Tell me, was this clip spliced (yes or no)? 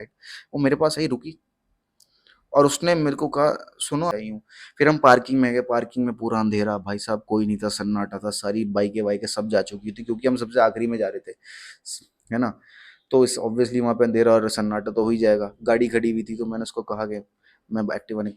yes